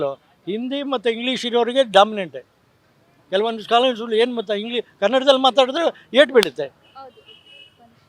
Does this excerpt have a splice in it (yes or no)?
yes